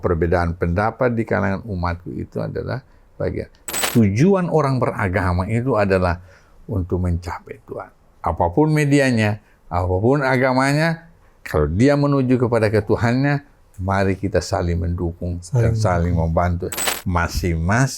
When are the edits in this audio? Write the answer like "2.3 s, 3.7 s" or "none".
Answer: 3.9 s, 16.9 s